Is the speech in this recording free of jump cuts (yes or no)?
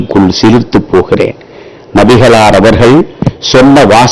yes